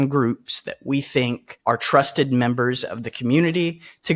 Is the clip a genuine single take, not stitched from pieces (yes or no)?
no